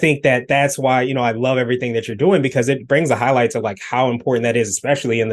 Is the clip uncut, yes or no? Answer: yes